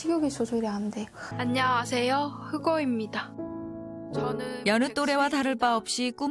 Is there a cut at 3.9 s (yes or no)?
no